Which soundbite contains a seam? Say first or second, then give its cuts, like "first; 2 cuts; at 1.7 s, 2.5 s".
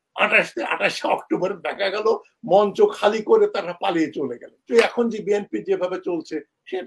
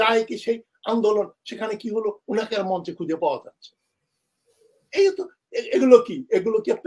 first; 1 cut; at 4.6 s